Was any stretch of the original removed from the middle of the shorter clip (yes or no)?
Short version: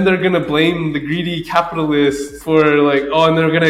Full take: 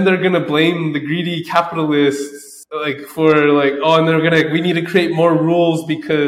yes